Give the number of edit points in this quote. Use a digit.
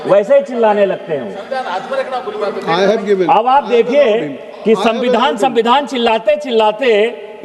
0